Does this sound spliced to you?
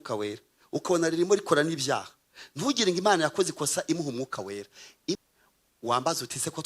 yes; 1 cut; at 5.2 s

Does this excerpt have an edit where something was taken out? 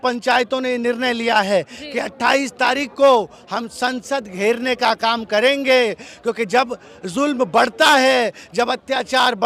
no; 0 cuts

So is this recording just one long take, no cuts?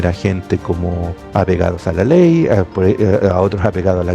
no; 1 cut; at 1.1 s

